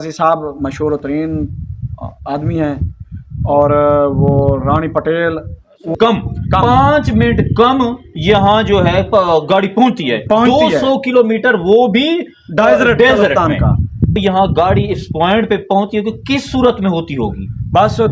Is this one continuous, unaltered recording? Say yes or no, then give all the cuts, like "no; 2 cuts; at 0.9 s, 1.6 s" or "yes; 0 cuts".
no; 2 cuts; at 6.0 s, 14.1 s